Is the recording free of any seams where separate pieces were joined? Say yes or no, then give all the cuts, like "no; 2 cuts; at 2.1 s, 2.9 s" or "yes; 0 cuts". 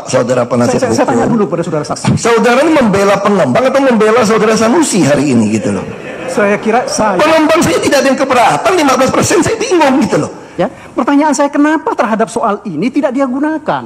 no; 1 cut; at 10.4 s